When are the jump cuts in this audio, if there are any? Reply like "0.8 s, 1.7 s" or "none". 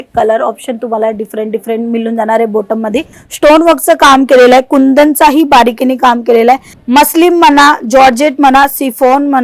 3.2 s, 6.7 s